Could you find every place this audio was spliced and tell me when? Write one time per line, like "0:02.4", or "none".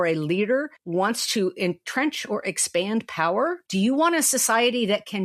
0:03.6